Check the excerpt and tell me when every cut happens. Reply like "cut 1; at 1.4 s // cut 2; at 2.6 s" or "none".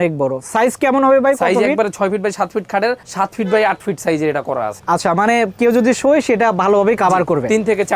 none